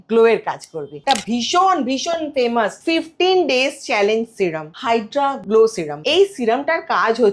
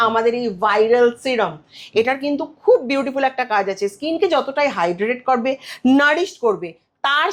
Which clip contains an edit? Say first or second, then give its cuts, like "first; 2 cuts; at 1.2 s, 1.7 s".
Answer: first; 4 cuts; at 0.9 s, 2.8 s, 5.1 s, 5.9 s